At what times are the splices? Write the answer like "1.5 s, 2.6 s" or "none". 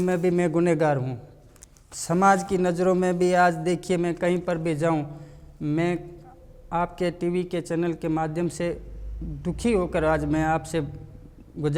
none